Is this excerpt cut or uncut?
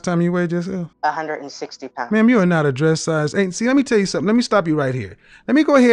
cut